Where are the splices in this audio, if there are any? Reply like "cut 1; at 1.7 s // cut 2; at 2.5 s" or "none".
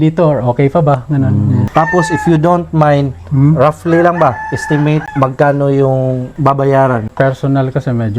cut 1; at 1.7 s // cut 2; at 5.1 s // cut 3; at 6.3 s // cut 4; at 7.1 s